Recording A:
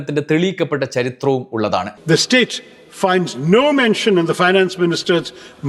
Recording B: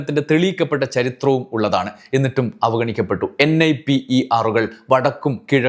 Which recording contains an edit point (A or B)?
A